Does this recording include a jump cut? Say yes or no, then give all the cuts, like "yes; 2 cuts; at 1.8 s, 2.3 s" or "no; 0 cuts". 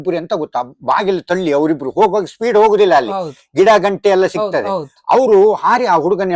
no; 0 cuts